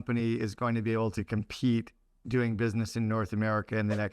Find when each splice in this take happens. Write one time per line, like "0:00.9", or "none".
none